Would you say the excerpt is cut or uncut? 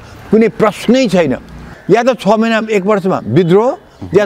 cut